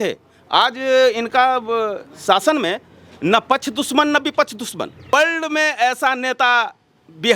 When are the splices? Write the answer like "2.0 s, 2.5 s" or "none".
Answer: 5.1 s